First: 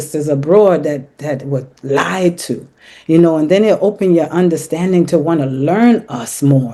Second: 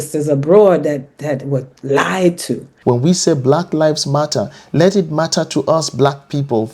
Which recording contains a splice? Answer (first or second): second